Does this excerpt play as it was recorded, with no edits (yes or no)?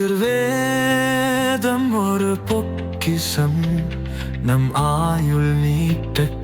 yes